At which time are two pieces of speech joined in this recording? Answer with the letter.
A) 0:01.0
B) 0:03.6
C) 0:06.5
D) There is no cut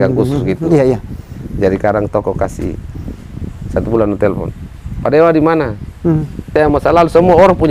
C